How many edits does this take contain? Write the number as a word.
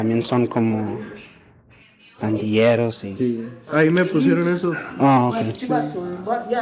one